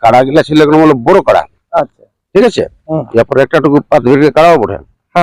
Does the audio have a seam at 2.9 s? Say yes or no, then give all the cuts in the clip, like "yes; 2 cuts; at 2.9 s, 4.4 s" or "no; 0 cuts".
no; 0 cuts